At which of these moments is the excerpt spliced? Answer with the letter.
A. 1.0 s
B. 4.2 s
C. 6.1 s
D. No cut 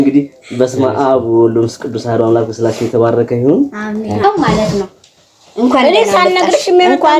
B